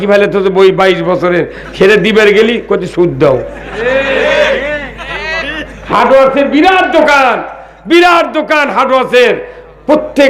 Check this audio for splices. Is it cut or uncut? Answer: uncut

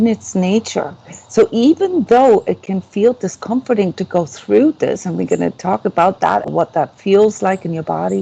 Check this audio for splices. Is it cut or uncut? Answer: cut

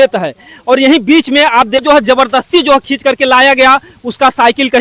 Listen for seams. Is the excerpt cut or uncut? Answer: cut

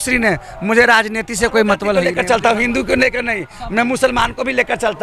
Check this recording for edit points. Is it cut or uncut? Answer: cut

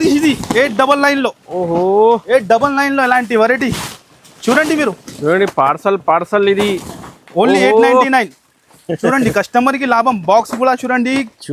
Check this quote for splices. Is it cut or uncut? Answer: uncut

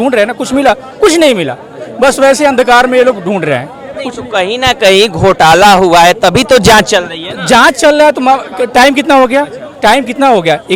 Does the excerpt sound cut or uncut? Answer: uncut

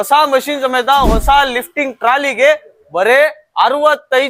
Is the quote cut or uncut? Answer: uncut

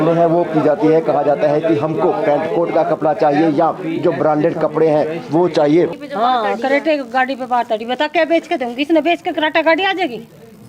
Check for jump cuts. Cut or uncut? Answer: cut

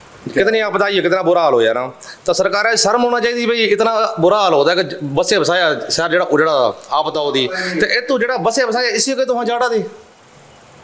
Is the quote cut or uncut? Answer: uncut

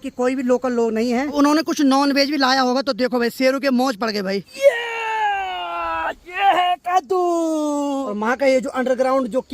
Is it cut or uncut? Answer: cut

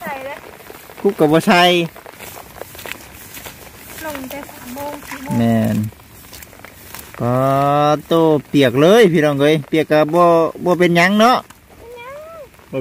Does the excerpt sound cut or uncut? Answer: cut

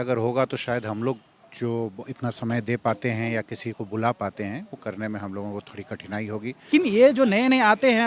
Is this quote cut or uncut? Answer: cut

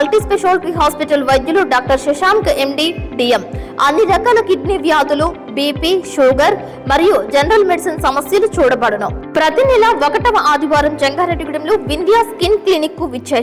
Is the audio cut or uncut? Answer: uncut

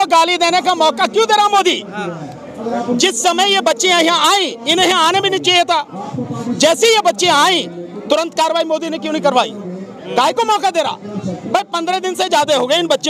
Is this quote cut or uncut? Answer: uncut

